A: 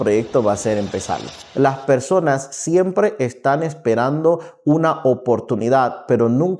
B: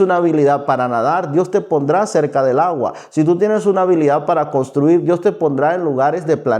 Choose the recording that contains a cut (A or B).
A